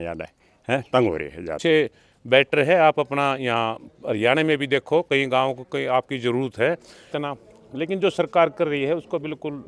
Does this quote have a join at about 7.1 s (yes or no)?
yes